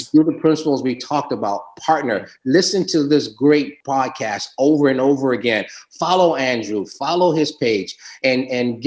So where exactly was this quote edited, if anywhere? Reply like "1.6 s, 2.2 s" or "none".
3.8 s